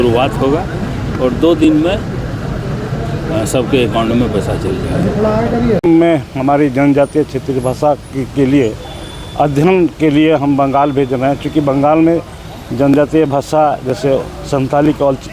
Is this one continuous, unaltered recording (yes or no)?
no